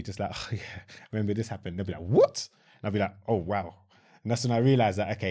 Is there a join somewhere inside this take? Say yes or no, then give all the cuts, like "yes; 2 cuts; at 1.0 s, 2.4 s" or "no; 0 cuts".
no; 0 cuts